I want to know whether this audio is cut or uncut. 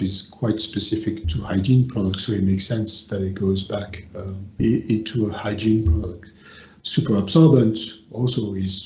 uncut